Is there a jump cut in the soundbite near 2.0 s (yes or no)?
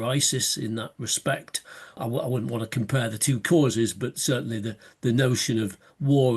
yes